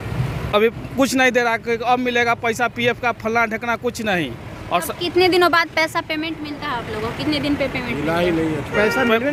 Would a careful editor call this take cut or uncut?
uncut